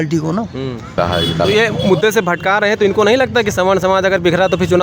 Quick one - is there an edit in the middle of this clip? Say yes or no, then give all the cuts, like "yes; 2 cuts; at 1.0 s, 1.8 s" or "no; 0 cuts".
yes; 1 cut; at 0.9 s